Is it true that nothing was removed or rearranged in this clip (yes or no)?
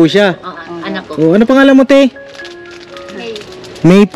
yes